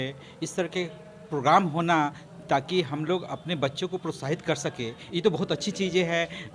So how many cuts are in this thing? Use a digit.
1